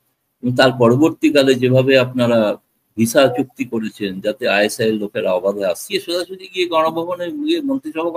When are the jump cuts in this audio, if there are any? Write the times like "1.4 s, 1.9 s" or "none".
5.9 s